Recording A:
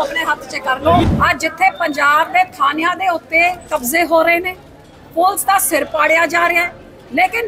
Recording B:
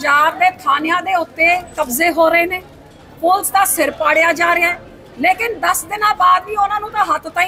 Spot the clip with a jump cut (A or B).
A